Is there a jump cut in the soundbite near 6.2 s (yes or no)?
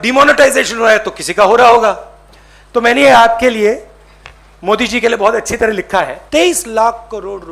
yes